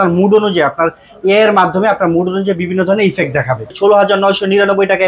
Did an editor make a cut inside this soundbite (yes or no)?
yes